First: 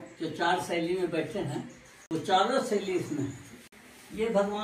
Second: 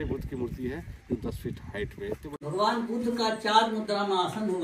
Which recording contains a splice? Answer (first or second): second